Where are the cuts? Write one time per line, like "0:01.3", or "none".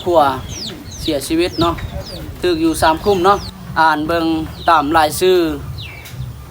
0:03.6

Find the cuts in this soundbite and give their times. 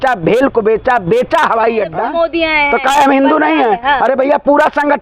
0:02.0

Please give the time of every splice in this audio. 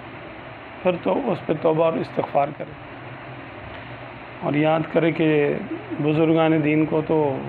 0:02.6

